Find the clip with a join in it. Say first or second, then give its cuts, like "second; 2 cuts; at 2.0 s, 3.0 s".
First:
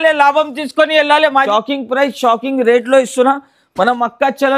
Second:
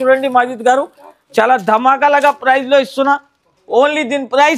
first; 1 cut; at 1.5 s